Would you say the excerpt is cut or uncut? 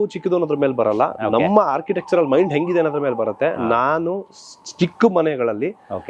uncut